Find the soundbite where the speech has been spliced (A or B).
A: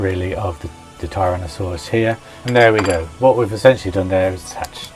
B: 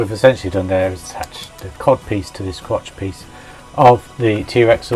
A